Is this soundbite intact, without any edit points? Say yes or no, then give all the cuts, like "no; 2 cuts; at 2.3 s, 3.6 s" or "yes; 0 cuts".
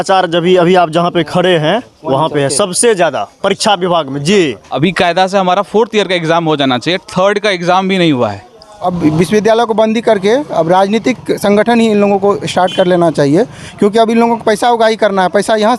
no; 2 cuts; at 4.6 s, 8.8 s